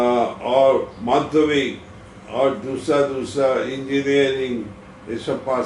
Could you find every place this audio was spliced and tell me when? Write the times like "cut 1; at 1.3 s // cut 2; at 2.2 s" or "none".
none